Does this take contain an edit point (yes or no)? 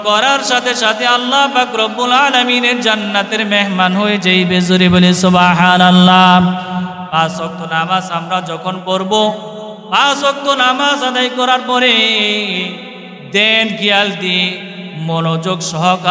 no